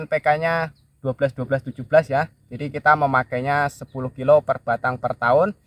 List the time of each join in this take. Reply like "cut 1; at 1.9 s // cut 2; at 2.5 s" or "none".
none